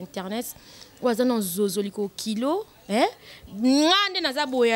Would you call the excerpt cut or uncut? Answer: uncut